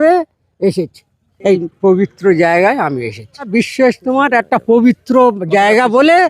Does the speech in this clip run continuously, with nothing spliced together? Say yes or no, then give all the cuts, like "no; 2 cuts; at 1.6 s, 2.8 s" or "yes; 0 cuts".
no; 2 cuts; at 1.6 s, 3.5 s